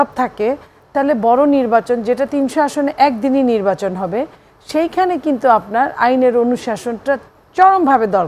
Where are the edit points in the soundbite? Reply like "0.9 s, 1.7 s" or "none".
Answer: none